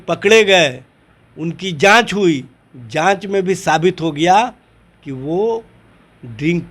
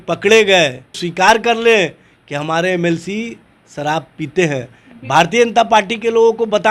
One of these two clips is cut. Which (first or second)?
second